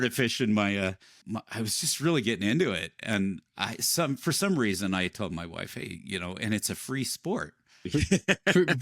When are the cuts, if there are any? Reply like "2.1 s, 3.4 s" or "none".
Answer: 1.1 s